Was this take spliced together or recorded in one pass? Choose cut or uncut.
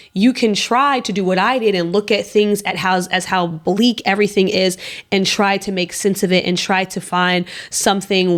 uncut